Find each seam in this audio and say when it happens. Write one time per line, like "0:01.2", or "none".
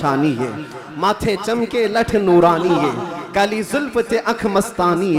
none